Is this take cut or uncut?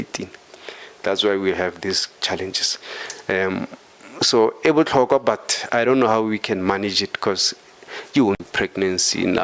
cut